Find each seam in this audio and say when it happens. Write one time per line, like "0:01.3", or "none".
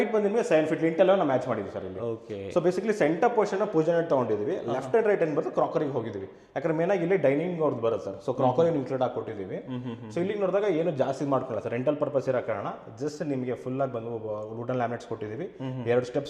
none